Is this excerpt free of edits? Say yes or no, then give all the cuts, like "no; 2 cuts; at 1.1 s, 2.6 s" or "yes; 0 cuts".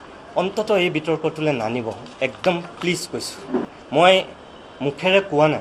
yes; 0 cuts